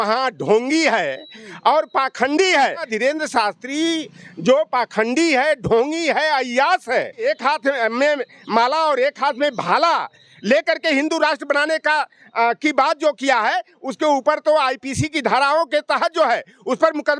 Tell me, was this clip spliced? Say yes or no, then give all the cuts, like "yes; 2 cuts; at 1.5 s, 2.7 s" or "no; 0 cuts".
yes; 2 cuts; at 2.9 s, 7.3 s